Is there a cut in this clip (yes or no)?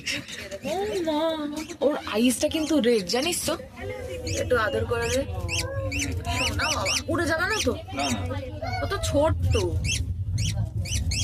no